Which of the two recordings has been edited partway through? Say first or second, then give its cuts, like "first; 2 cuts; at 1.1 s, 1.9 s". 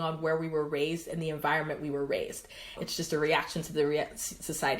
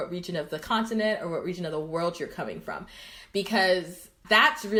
first; 1 cut; at 2.8 s